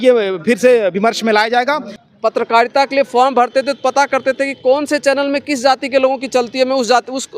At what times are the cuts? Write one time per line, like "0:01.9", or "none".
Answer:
0:01.9